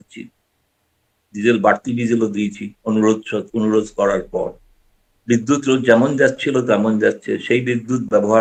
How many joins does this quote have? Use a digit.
0